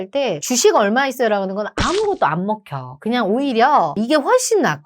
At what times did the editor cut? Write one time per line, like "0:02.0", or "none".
0:03.9